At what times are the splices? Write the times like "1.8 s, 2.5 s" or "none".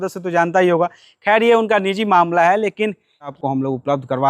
3.4 s